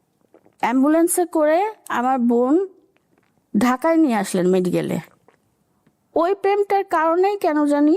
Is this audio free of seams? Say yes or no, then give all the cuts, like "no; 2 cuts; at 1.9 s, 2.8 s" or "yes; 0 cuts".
no; 1 cut; at 5.5 s